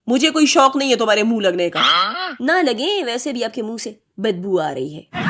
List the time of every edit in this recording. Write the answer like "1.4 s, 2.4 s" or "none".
none